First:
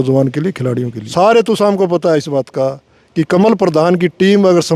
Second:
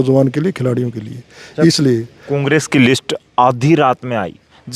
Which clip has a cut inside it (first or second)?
first